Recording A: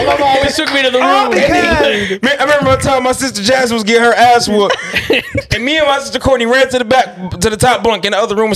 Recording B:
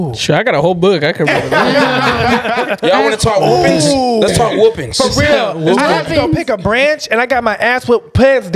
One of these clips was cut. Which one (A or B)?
A